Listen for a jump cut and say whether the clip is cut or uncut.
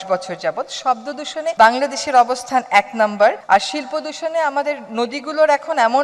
cut